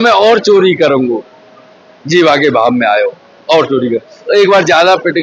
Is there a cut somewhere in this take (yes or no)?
no